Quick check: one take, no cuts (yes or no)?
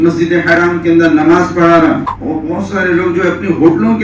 no